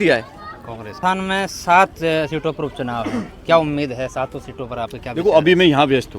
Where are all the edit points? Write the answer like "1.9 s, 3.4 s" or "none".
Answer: 0.9 s

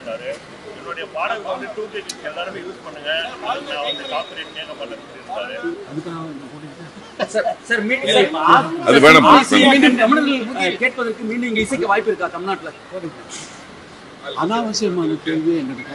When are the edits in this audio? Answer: none

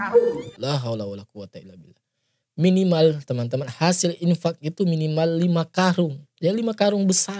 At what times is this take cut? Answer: none

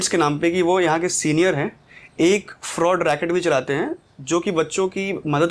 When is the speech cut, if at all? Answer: none

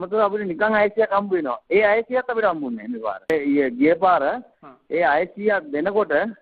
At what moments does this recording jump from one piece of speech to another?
2.1 s

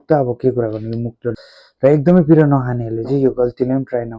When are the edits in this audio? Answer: 1.4 s

